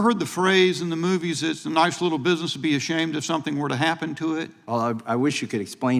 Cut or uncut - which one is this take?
cut